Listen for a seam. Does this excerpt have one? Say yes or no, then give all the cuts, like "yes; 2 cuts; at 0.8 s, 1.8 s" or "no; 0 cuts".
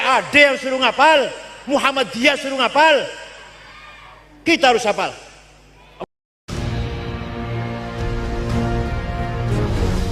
yes; 1 cut; at 6.0 s